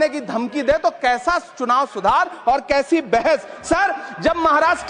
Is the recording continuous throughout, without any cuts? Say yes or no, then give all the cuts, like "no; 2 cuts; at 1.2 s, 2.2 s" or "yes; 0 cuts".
yes; 0 cuts